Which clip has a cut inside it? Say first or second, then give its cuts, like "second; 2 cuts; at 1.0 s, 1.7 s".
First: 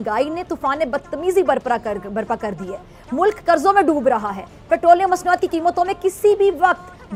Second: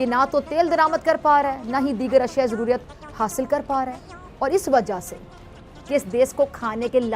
second; 1 cut; at 5.8 s